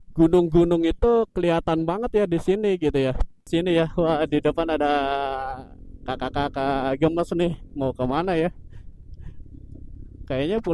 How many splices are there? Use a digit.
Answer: 1